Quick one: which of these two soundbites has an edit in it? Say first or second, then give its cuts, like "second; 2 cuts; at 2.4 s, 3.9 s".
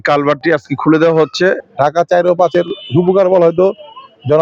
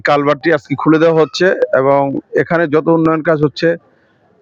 first; 1 cut; at 1.6 s